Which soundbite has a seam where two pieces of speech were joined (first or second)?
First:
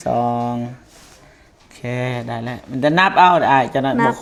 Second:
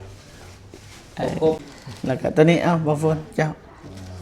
second